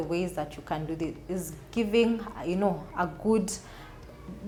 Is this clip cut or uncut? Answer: uncut